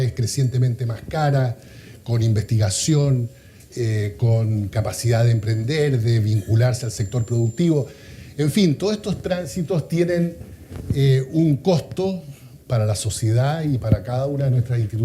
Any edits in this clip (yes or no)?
yes